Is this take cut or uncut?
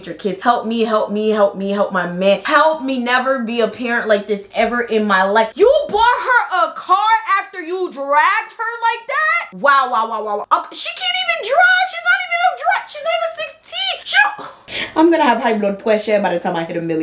uncut